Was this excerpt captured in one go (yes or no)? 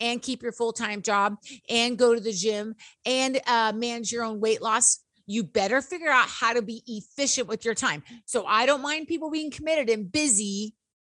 yes